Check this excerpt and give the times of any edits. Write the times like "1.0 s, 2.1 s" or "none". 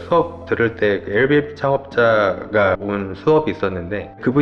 2.8 s